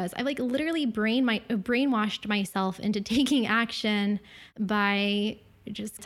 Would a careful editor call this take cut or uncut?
uncut